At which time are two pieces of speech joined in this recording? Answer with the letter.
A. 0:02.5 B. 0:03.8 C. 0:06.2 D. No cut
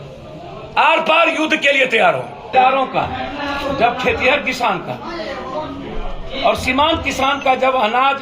A